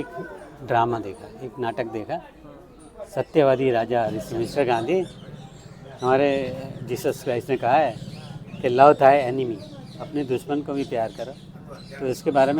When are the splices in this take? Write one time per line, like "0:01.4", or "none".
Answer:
0:04.2